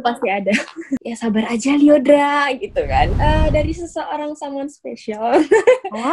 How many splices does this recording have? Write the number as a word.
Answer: two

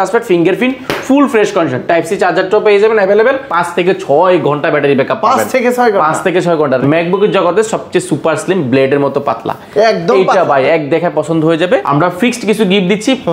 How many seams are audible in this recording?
three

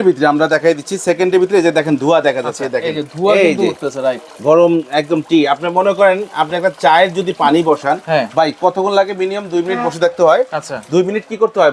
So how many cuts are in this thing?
zero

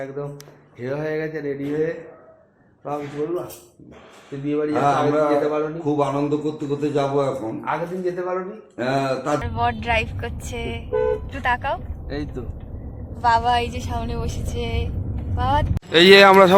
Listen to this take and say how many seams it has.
two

